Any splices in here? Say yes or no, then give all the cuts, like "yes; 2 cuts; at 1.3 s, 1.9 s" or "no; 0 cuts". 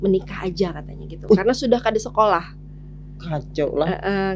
no; 0 cuts